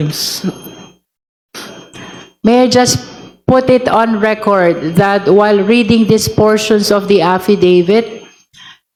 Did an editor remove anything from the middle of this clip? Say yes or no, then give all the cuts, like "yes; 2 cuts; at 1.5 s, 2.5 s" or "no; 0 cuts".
no; 0 cuts